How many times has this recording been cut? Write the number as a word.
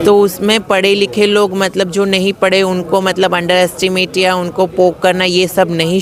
zero